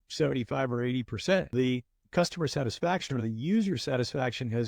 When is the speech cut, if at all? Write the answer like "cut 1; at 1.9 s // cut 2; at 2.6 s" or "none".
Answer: cut 1; at 1.5 s